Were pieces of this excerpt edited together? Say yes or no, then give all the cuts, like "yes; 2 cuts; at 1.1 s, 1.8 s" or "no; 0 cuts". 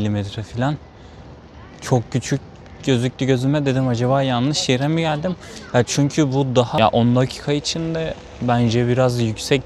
yes; 1 cut; at 6.8 s